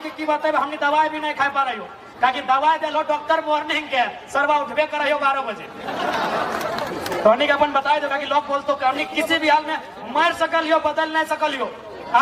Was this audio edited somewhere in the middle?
no; 0 cuts

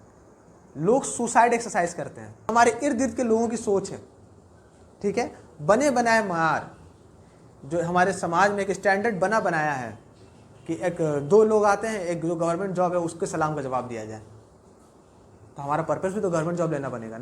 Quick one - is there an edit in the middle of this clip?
yes; 1 cut; at 2.5 s

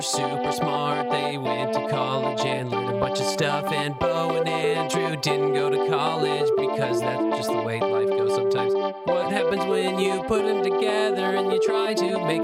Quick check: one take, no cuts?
yes; 0 cuts

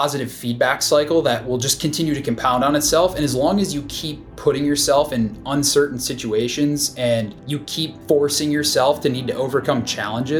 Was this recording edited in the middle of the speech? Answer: no; 0 cuts

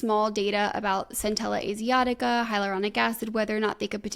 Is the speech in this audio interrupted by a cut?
no; 0 cuts

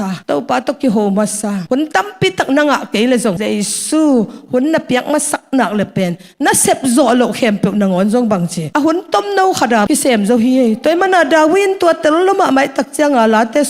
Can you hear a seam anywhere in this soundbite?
no; 0 cuts

